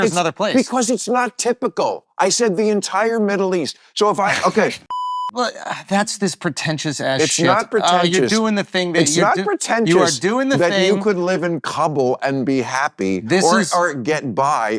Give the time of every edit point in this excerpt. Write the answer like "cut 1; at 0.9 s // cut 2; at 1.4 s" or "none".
cut 1; at 4.9 s